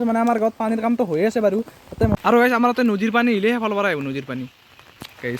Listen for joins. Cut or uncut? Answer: cut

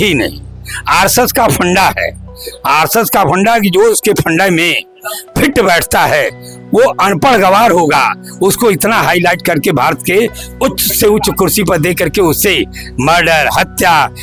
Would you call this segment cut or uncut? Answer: uncut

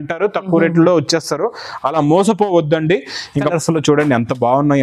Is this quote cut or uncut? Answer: cut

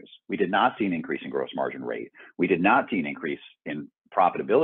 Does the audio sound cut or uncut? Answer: uncut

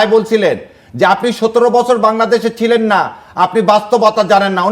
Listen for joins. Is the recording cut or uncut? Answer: uncut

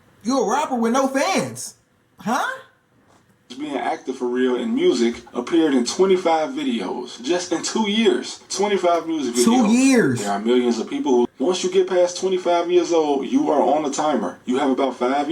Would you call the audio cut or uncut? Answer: cut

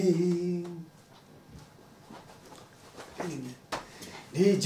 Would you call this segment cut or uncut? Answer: uncut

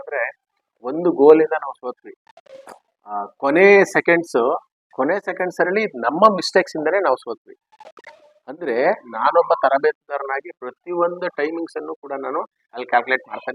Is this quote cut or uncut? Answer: uncut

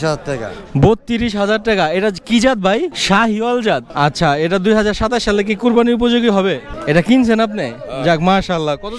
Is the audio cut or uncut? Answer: cut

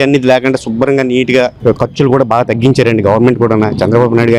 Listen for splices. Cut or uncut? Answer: uncut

